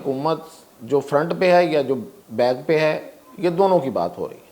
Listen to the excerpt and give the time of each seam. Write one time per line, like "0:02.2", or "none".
0:02.2